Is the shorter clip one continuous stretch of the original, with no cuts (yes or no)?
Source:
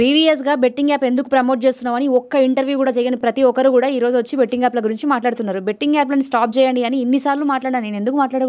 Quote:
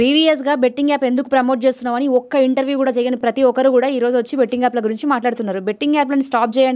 yes